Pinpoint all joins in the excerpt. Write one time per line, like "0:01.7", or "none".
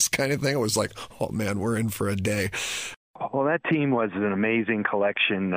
0:02.8